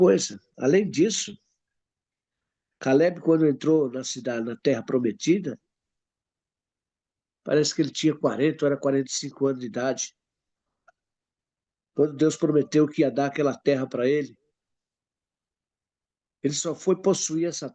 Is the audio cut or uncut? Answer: uncut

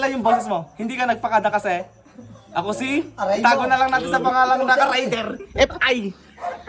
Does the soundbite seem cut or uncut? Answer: uncut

